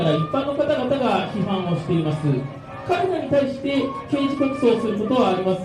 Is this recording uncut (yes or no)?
yes